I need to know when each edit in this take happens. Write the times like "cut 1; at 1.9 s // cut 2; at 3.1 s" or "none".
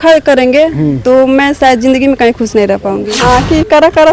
cut 1; at 3.1 s